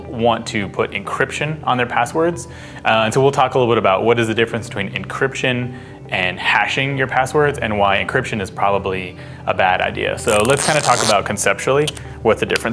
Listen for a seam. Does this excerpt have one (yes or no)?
no